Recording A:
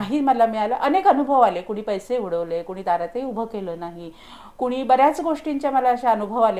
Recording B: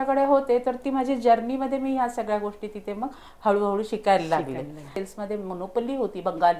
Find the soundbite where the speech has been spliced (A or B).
B